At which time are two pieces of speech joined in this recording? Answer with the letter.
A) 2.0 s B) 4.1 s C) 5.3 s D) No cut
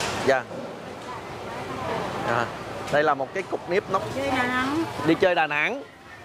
B